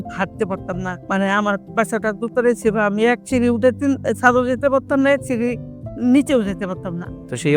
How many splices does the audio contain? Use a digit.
1